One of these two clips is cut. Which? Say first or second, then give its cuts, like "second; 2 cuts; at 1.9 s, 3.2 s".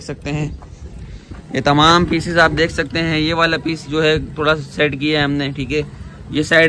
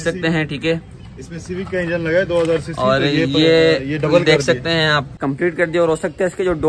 second; 1 cut; at 5.2 s